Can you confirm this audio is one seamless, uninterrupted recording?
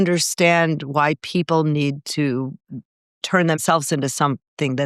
no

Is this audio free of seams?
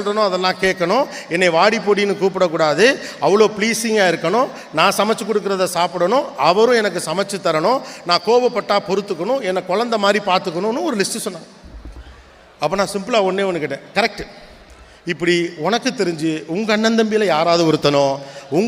yes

